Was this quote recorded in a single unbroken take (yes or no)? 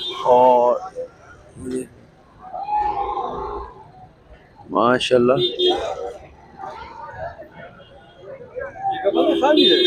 yes